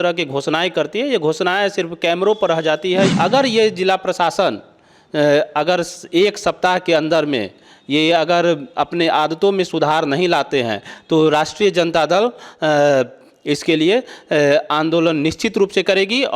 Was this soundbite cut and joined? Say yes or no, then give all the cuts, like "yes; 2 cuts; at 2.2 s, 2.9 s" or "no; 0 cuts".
yes; 1 cut; at 3.1 s